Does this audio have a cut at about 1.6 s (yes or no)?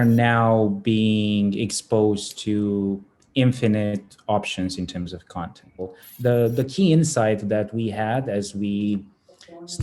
no